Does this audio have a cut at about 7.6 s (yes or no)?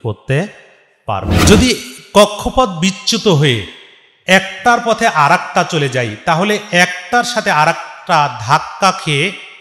no